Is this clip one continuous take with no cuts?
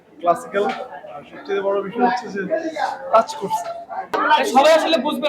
no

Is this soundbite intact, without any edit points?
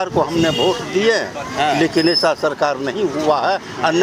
yes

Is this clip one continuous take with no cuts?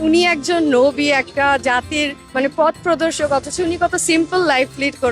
no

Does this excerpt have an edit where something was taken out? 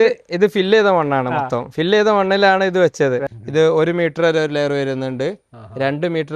yes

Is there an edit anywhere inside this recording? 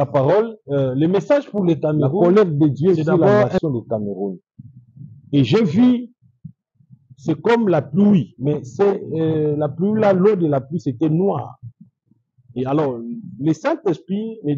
yes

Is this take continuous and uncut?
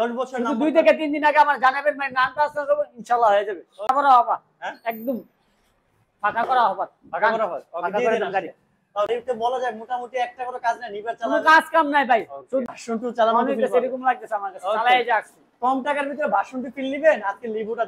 no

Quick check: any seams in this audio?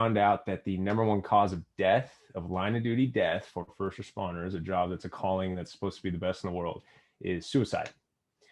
no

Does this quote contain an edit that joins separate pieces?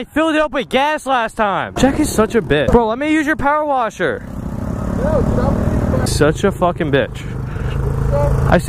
yes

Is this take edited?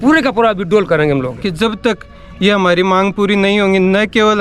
yes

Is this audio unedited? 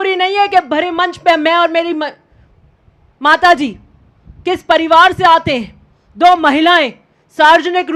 yes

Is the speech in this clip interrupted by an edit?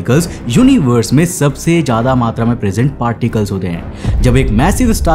no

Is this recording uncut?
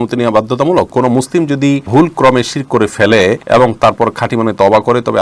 no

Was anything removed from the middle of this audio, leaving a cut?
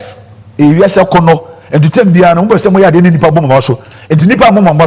no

